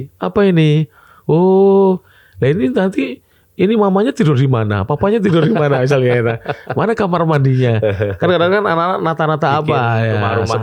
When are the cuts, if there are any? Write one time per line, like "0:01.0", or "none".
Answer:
none